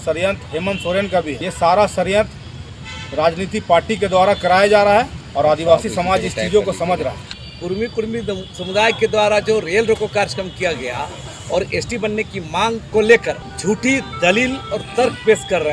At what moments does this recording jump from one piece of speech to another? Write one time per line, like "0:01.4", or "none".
0:01.4
0:07.3
0:12.8
0:13.5